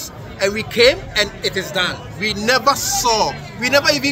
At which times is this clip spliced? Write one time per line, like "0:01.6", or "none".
none